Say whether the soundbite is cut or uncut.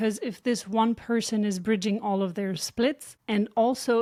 uncut